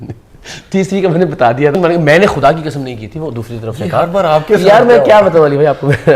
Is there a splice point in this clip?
yes; 1 cut; at 1.7 s

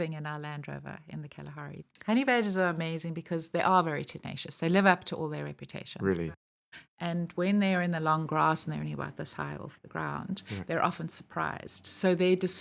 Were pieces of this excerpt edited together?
yes; 2 cuts; at 1.8 s, 6.3 s

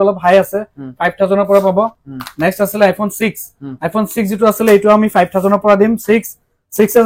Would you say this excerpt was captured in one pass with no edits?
yes; 0 cuts

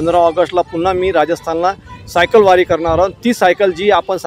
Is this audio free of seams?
yes; 0 cuts

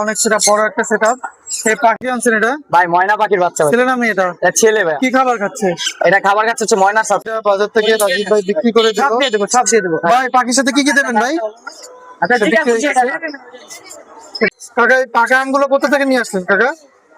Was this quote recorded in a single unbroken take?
no; 3 cuts; at 2.0 s, 7.3 s, 14.5 s

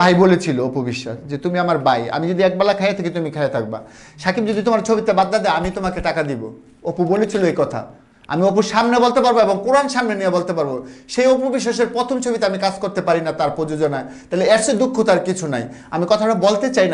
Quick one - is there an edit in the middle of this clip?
no; 0 cuts

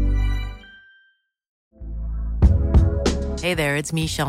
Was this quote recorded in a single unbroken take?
no; 1 cut; at 1.5 s

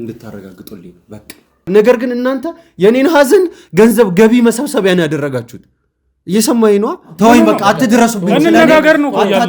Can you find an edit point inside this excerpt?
yes; 2 cuts; at 1.7 s, 7.1 s

